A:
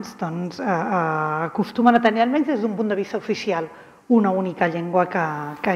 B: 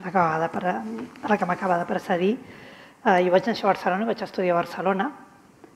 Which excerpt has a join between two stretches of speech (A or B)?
B